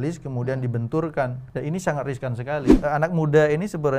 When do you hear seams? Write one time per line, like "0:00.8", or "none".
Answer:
0:01.4
0:02.7